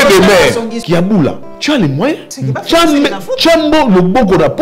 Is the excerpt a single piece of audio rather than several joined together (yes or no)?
no